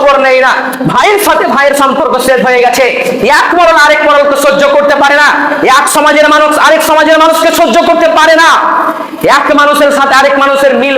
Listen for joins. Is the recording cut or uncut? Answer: uncut